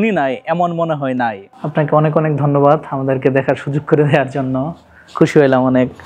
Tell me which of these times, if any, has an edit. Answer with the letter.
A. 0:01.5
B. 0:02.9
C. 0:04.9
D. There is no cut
A